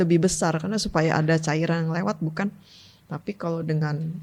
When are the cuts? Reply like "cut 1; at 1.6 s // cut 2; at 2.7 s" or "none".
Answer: none